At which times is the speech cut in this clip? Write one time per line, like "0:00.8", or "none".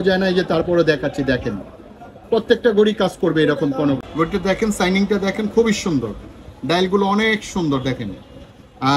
0:04.1

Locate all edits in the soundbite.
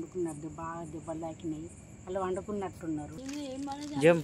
0:03.2

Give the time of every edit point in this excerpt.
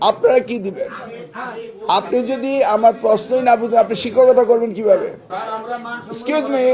0:05.3

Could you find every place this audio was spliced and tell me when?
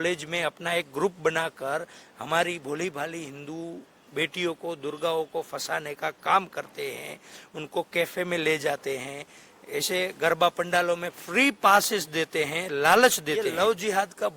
0:13.5

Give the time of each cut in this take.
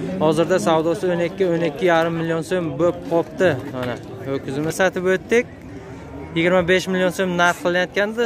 0:04.8

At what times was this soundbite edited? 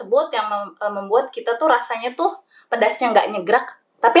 none

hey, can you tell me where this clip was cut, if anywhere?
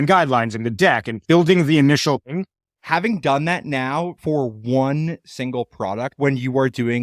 0:01.1
0:02.3
0:06.1

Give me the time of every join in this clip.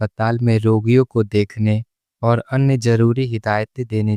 none

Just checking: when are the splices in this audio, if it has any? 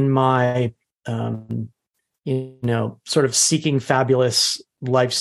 none

